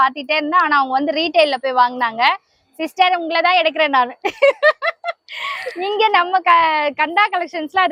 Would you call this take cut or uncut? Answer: uncut